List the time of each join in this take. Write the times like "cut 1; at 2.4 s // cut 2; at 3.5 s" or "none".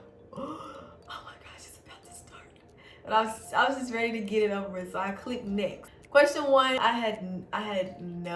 cut 1; at 5.9 s // cut 2; at 6.8 s